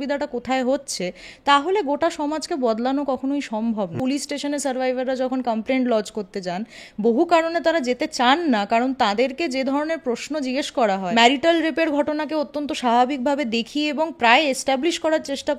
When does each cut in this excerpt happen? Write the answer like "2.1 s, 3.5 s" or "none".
4.0 s, 11.1 s